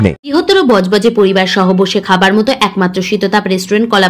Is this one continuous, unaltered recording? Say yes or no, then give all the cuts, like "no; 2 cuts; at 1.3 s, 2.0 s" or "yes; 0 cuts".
yes; 0 cuts